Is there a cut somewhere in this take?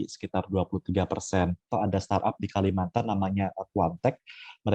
yes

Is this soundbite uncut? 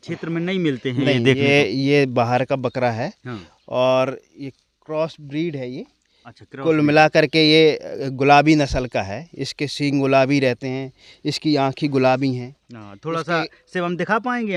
yes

